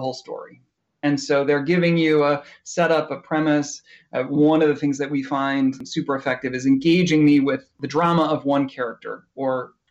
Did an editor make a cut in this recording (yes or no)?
yes